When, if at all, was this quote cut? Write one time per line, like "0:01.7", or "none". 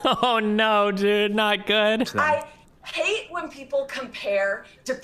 0:02.1